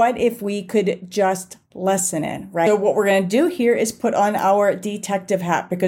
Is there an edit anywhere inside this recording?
yes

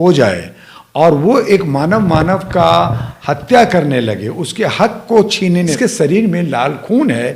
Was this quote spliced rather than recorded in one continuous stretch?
yes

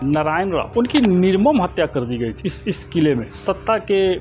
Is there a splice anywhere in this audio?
no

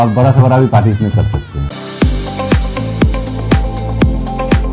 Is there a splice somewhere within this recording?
yes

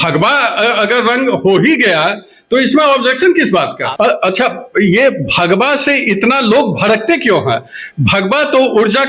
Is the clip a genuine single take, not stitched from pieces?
no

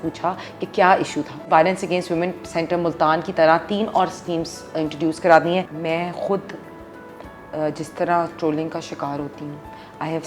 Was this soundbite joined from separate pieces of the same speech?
yes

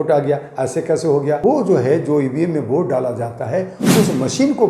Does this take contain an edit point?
yes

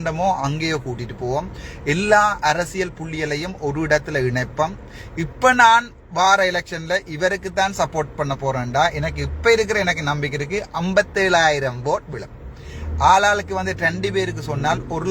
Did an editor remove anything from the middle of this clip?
no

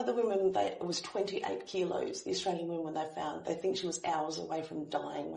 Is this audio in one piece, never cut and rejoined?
yes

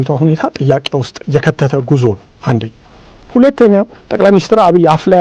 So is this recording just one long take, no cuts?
no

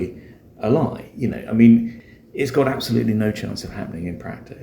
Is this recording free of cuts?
no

